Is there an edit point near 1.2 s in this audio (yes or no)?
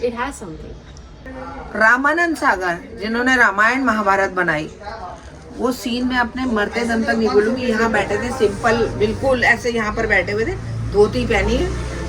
yes